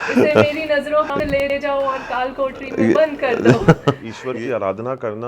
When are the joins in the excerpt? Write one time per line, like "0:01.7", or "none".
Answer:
0:04.1